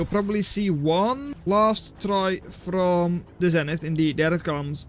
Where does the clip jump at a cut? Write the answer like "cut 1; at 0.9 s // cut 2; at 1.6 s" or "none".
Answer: cut 1; at 1.3 s // cut 2; at 3.3 s